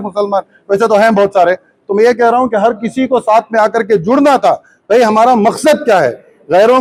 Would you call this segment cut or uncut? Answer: uncut